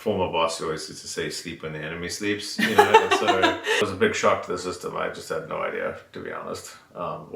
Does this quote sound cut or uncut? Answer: cut